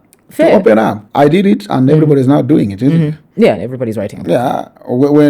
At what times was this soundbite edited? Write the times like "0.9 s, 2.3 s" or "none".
1.0 s